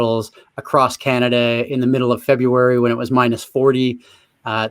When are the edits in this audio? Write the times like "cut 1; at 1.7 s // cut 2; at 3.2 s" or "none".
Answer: none

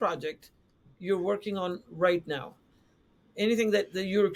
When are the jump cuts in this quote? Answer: none

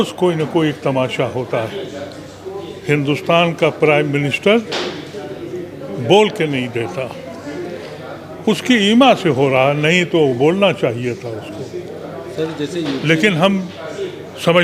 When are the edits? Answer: none

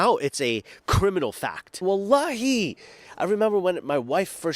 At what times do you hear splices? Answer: cut 1; at 1.8 s

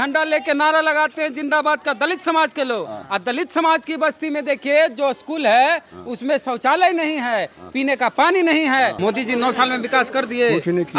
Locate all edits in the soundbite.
cut 1; at 9.0 s

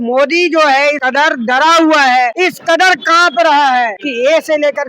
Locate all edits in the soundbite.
cut 1; at 1.0 s // cut 2; at 2.3 s // cut 3; at 4.0 s

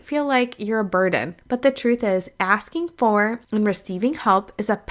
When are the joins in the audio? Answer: cut 1; at 1.3 s // cut 2; at 3.4 s

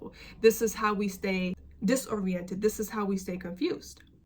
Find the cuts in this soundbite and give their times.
cut 1; at 1.6 s

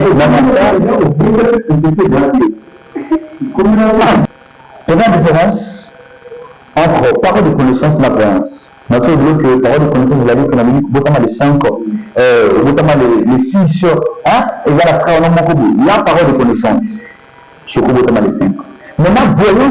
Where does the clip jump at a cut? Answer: cut 1; at 4.3 s

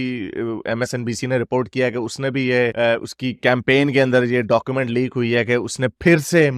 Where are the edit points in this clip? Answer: none

